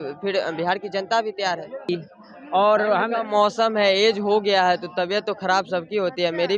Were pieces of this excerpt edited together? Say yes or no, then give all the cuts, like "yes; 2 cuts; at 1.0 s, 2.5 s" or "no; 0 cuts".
yes; 1 cut; at 1.9 s